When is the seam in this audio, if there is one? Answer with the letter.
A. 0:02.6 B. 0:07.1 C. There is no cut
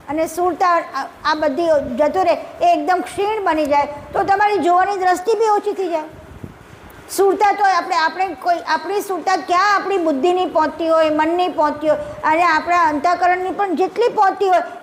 C